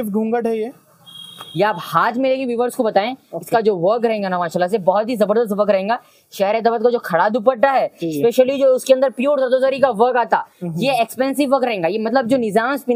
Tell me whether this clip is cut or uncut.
uncut